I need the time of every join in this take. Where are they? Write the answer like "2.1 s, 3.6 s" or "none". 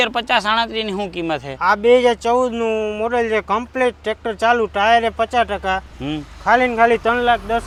none